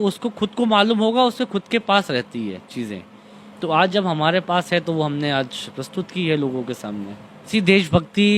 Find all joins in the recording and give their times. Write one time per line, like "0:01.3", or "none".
0:07.4